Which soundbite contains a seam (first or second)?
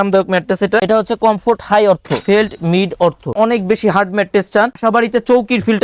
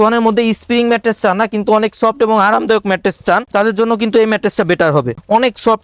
first